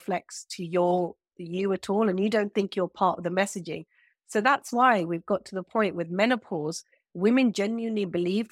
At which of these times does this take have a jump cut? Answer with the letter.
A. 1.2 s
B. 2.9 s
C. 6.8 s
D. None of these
D